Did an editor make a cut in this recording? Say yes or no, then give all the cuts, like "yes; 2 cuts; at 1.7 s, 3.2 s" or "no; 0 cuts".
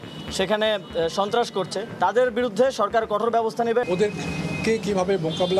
yes; 2 cuts; at 1.8 s, 3.8 s